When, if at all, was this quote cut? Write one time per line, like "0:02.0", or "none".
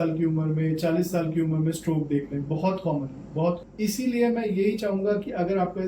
0:03.6